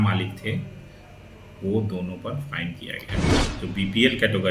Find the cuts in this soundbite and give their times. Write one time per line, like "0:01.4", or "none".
0:03.4